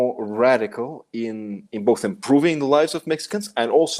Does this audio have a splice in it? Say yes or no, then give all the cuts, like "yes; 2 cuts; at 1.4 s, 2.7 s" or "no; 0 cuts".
no; 0 cuts